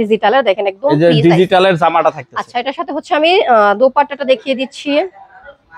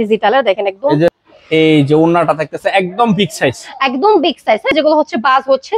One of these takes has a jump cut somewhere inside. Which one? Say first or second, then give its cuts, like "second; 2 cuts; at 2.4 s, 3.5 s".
second; 2 cuts; at 1.1 s, 4.7 s